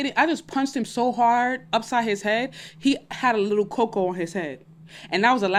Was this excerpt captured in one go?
yes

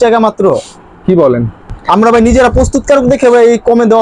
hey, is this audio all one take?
no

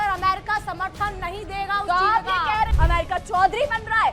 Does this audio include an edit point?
yes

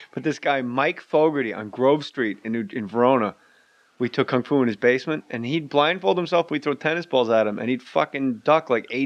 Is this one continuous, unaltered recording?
yes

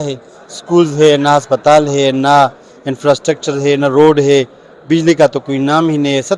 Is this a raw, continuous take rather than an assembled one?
yes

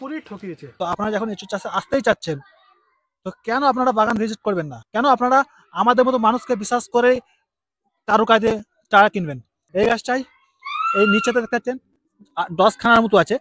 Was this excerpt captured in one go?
no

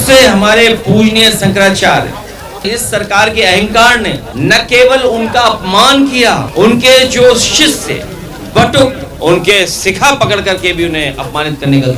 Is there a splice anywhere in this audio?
yes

